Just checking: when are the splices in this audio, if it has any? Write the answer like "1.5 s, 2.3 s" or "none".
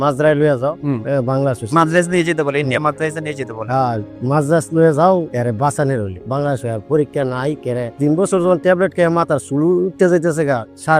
none